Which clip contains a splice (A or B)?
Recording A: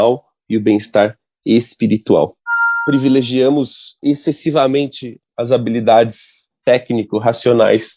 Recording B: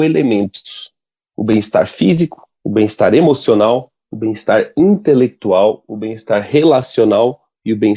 A